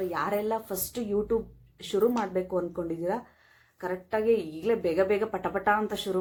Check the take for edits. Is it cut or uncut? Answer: uncut